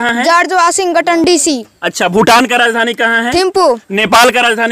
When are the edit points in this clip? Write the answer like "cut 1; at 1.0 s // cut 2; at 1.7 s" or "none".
none